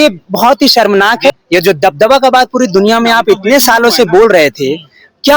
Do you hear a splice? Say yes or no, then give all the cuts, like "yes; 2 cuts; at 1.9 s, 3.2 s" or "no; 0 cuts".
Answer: yes; 1 cut; at 1.3 s